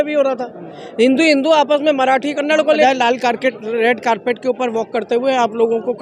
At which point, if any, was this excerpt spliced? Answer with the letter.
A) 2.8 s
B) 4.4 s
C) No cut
A